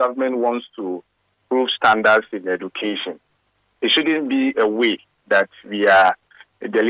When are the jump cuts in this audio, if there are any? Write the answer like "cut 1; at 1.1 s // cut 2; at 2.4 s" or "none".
cut 1; at 1.4 s